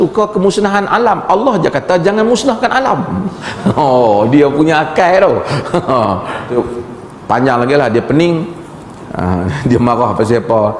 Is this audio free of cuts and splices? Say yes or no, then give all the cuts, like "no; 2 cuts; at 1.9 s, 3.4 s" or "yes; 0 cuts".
no; 1 cut; at 6.5 s